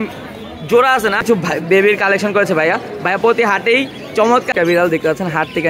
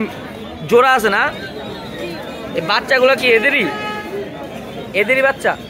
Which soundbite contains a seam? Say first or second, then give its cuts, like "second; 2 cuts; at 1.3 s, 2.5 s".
first; 2 cuts; at 1.5 s, 4.5 s